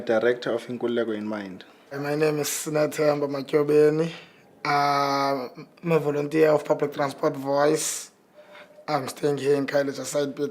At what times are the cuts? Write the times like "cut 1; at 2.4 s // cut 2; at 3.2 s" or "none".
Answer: cut 1; at 2.9 s